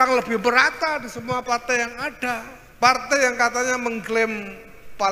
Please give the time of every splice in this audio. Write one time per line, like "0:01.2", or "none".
0:02.6